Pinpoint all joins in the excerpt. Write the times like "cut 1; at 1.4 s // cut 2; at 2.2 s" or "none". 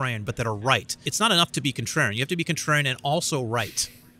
cut 1; at 1.1 s